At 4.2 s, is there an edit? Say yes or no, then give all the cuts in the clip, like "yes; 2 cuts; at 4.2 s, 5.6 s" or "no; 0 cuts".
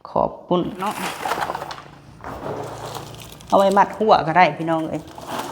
no; 1 cut; at 1.0 s